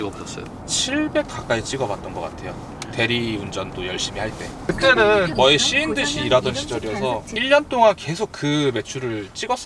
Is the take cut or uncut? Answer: uncut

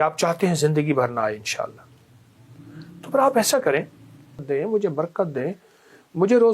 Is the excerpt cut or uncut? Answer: cut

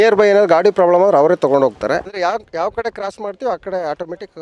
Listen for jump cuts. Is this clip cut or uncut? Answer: cut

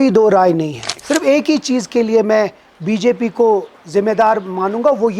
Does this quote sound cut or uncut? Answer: cut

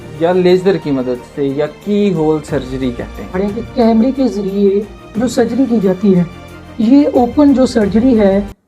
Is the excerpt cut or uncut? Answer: cut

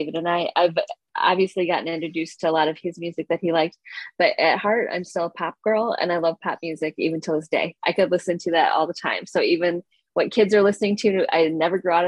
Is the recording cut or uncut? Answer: uncut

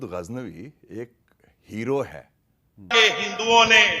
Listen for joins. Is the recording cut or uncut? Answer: cut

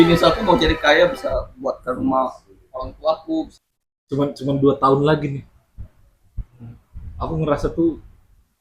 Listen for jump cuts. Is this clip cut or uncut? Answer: cut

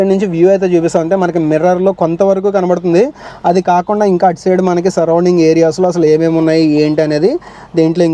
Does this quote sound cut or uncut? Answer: uncut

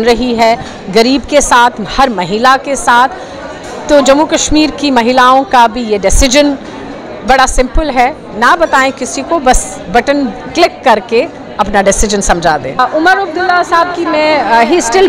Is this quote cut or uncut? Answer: cut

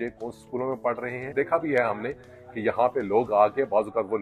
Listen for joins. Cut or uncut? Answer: cut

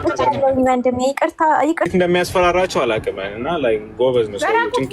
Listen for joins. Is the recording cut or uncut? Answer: cut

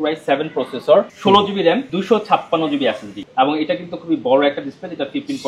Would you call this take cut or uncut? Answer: cut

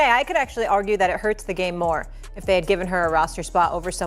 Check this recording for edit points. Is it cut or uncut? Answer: uncut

